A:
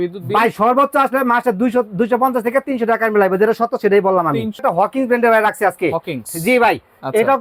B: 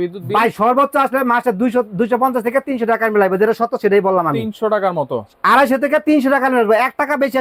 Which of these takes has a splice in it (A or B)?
A